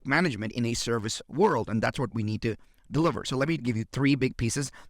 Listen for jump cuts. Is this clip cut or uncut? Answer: uncut